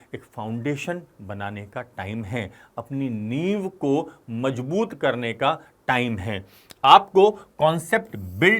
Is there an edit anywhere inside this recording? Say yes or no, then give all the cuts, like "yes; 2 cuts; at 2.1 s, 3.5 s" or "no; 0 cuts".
no; 0 cuts